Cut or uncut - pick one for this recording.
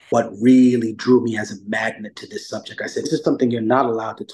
cut